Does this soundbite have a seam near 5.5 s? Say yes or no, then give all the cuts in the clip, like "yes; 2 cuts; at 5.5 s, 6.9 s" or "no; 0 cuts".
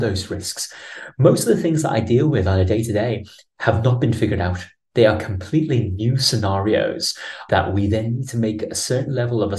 no; 1 cut; at 7.4 s